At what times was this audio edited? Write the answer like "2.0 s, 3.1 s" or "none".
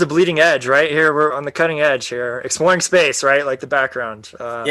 1.4 s